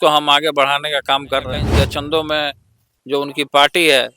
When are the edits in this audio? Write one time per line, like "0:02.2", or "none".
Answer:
0:01.7